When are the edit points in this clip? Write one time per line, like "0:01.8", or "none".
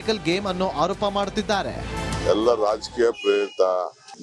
none